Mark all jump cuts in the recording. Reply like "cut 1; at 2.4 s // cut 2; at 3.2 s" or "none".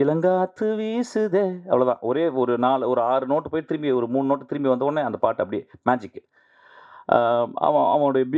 none